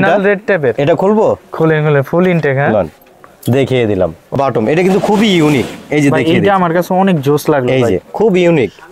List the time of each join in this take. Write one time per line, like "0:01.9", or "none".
0:04.4